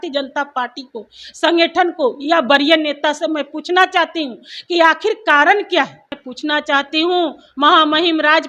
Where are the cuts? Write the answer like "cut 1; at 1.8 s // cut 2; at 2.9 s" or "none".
cut 1; at 6.2 s